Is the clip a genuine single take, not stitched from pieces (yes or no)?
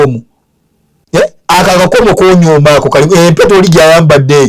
yes